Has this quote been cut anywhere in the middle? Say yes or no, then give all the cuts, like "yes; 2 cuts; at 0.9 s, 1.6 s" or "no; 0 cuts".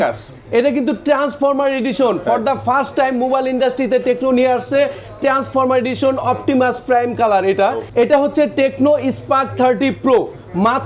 no; 0 cuts